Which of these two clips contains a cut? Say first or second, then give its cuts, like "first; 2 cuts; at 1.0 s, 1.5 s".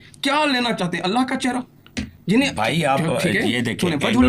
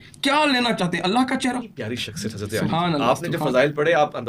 second; 1 cut; at 1.8 s